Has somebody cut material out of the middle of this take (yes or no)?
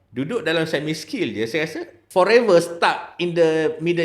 yes